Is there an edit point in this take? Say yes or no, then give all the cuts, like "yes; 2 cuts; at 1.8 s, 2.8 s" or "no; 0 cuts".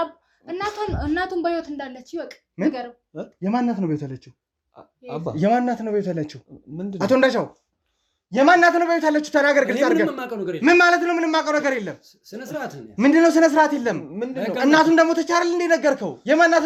no; 0 cuts